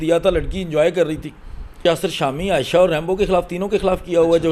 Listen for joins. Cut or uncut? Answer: cut